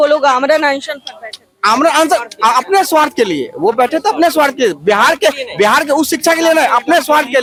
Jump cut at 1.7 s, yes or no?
no